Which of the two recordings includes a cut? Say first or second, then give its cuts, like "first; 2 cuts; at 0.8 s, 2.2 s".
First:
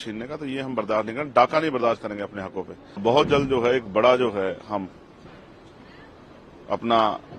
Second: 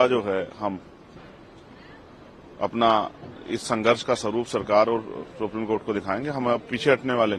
first; 1 cut; at 3.0 s